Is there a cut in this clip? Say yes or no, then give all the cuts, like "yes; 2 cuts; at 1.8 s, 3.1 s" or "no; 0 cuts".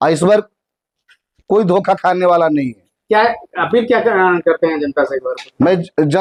no; 0 cuts